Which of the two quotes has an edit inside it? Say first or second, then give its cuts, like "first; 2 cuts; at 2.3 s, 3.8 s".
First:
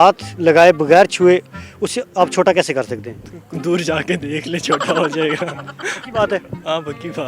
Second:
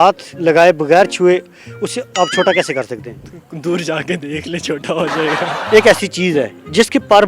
second; 1 cut; at 5.5 s